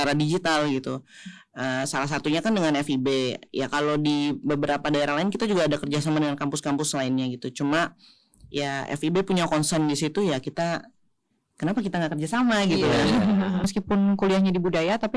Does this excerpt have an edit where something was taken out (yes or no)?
yes